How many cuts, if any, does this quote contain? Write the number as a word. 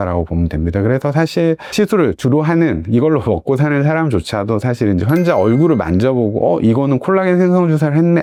zero